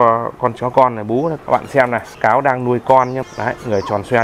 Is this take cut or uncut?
cut